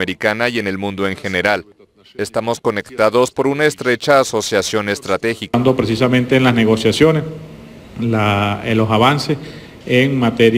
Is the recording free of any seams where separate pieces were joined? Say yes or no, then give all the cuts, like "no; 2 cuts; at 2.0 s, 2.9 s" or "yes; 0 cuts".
no; 1 cut; at 5.5 s